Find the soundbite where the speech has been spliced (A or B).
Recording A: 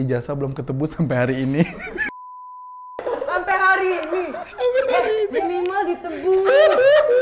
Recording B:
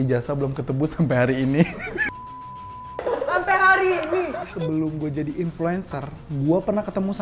B